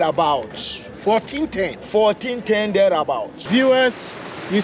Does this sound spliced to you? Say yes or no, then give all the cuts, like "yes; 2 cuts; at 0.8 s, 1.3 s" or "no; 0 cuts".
yes; 1 cut; at 3.3 s